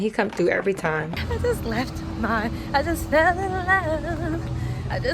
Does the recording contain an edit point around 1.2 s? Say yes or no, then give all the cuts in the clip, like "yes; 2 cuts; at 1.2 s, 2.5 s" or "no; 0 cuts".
yes; 1 cut; at 1.2 s